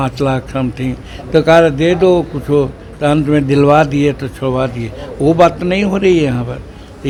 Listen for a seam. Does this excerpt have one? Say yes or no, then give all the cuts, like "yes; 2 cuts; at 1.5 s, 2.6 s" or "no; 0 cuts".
no; 0 cuts